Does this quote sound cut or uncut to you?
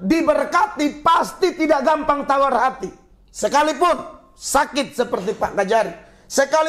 uncut